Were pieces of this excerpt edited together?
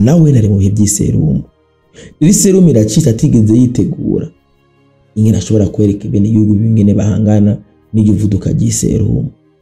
no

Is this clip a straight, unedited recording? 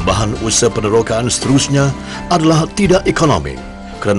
yes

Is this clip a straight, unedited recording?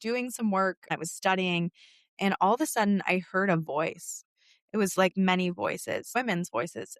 no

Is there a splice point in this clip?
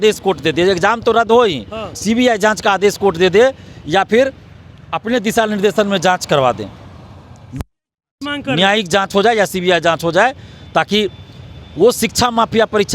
no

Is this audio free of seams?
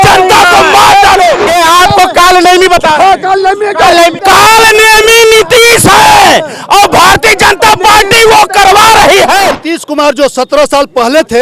no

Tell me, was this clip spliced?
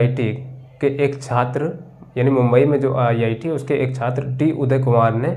no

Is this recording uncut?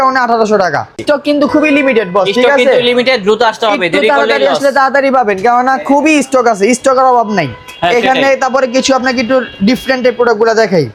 yes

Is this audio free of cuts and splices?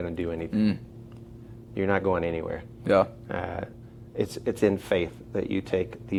yes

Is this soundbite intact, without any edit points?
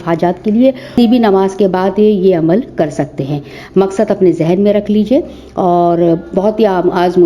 no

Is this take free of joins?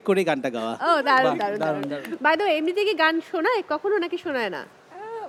yes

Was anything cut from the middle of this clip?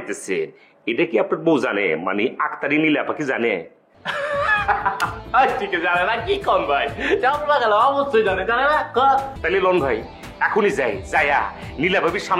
yes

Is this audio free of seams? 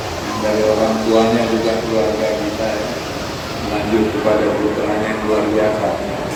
yes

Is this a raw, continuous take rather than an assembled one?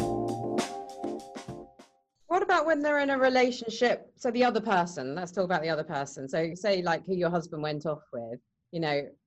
yes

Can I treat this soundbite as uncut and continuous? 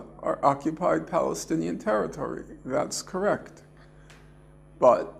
no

